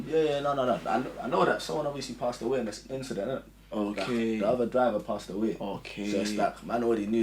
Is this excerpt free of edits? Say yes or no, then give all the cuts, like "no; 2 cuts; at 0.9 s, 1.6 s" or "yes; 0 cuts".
yes; 0 cuts